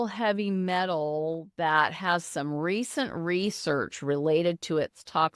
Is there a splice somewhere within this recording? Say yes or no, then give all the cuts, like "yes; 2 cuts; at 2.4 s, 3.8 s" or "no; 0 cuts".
no; 0 cuts